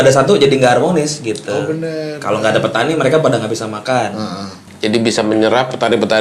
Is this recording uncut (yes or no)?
no